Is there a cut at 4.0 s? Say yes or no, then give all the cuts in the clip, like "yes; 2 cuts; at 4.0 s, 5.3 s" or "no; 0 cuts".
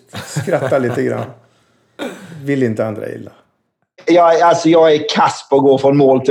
yes; 1 cut; at 4.0 s